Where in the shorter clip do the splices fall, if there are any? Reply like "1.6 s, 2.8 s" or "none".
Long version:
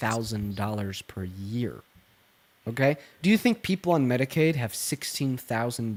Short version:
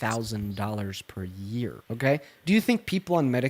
1.8 s